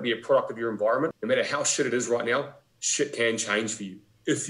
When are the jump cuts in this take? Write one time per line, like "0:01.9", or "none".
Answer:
0:01.2

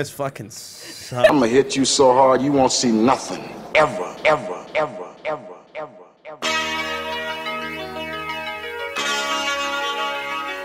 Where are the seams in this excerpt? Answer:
0:01.3

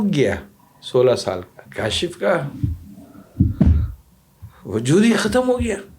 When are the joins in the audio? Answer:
0:01.6

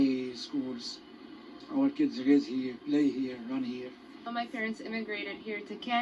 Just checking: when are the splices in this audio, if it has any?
0:04.3

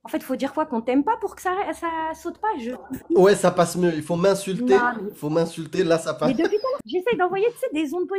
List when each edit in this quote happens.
none

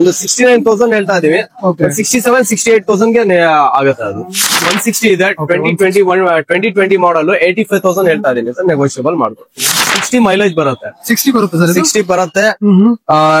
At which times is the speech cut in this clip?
0:04.5
0:09.9

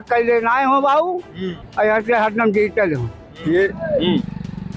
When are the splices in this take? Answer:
0:03.4

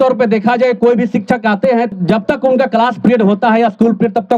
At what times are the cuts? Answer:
0:01.9

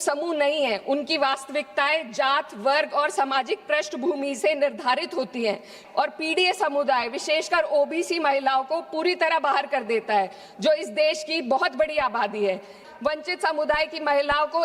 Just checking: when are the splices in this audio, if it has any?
0:05.8
0:12.9

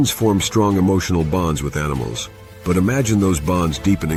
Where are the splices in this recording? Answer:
none

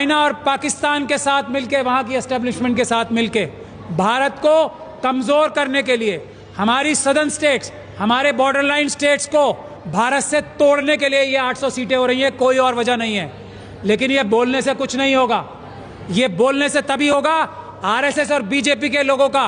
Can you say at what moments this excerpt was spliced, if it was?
none

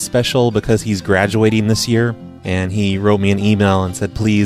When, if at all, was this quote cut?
0:01.4

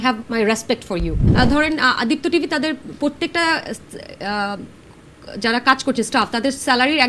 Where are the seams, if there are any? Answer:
0:01.2

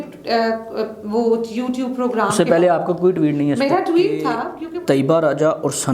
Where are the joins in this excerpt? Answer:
0:04.5

